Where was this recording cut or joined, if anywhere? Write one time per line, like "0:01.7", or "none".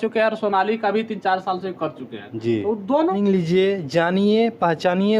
0:03.1